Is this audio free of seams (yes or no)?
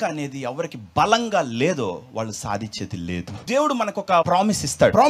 no